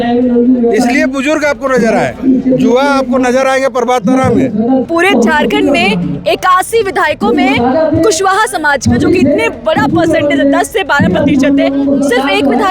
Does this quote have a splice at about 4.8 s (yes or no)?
yes